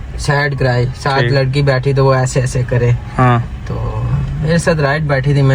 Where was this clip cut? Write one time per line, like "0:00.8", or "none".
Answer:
none